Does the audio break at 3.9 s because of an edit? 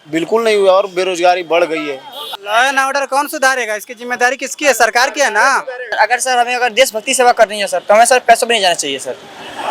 no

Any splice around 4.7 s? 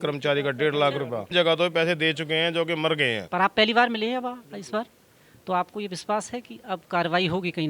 no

